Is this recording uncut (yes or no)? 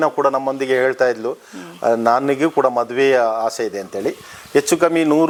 yes